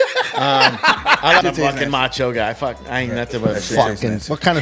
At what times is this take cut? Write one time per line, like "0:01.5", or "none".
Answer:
0:01.4